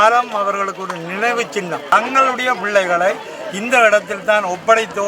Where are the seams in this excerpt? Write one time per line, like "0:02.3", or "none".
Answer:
0:01.9